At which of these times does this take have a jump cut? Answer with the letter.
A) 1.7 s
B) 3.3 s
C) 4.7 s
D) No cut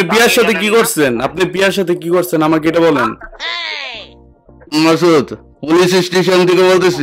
C